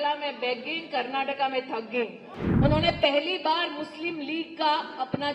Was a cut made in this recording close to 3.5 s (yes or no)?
no